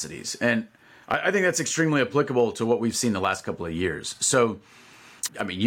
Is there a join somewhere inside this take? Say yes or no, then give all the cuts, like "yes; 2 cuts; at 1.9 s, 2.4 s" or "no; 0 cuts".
no; 0 cuts